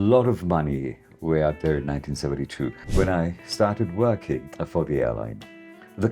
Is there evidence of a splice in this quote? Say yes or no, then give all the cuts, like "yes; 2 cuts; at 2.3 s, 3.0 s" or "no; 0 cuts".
yes; 2 cuts; at 2.8 s, 4.5 s